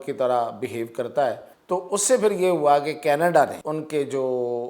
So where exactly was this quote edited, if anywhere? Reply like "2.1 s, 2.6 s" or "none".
1.5 s, 3.6 s